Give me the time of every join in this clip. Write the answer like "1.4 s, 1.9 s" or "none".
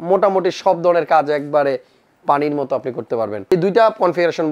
3.5 s